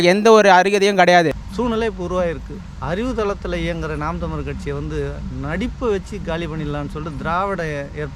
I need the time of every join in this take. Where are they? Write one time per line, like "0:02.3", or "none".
0:01.4